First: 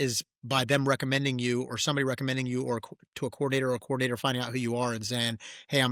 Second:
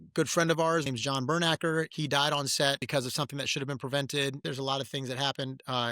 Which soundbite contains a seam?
second; 4 cuts; at 0.9 s, 1.9 s, 2.8 s, 4.4 s

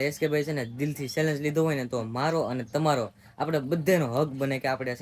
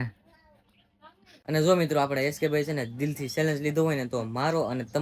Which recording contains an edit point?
second; 1 cut; at 1.3 s

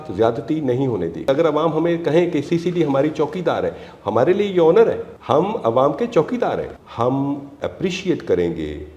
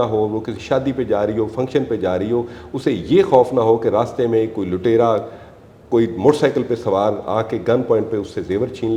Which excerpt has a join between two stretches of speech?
first; 3 cuts; at 1.3 s, 5.1 s, 6.8 s

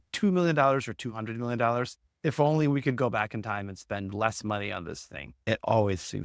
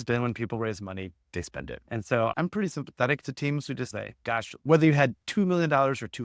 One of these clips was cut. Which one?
second; 2 cuts; at 2.3 s, 4.2 s

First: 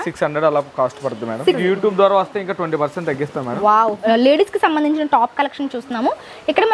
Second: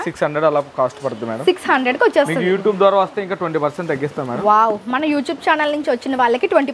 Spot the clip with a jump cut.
first; 2 cuts; at 1.6 s, 4.0 s

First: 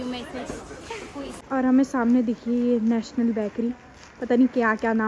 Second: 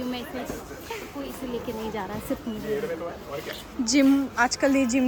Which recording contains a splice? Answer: first; 1 cut; at 1.3 s

